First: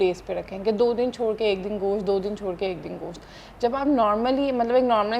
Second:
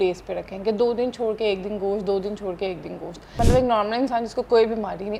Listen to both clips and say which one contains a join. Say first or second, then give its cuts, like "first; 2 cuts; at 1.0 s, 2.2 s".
second; 1 cut; at 3.4 s